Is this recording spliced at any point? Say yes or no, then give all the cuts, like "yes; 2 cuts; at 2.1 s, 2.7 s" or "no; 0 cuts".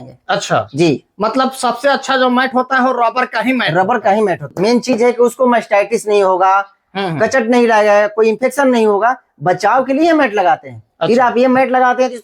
yes; 1 cut; at 4.5 s